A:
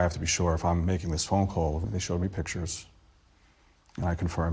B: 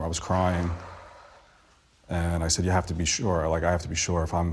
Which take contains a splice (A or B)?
A